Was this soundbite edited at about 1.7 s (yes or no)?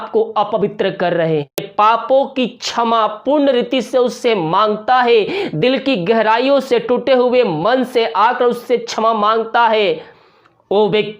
yes